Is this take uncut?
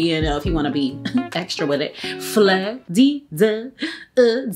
no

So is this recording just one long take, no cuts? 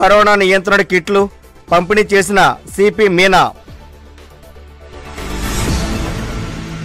yes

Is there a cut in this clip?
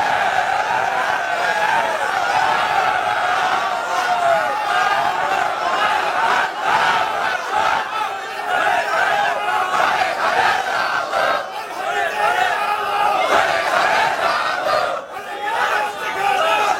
no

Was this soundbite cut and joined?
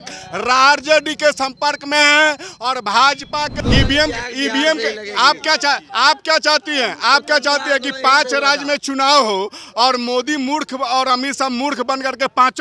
yes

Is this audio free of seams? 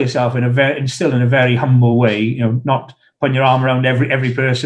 yes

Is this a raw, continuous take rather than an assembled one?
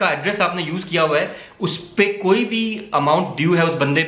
yes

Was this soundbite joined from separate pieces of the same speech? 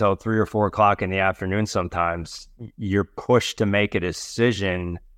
no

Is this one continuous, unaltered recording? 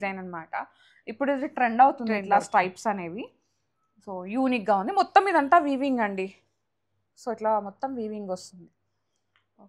yes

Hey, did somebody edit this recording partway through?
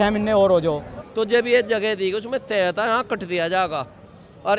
yes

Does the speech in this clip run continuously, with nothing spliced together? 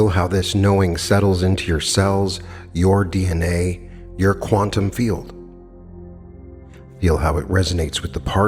yes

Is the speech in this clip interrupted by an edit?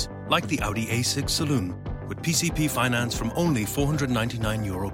no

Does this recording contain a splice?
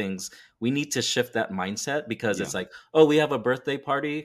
no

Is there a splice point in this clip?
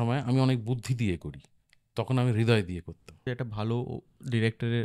yes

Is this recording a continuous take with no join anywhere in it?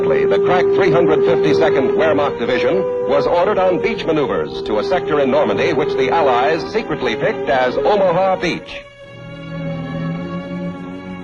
no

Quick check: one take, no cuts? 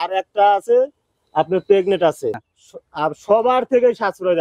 no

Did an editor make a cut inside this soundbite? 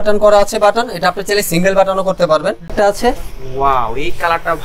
yes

